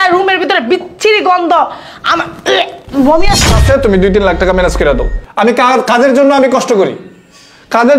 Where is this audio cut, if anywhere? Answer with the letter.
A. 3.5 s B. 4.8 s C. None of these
A